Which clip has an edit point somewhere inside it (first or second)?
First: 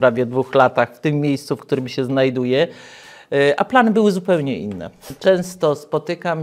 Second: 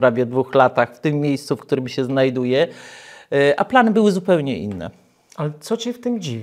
first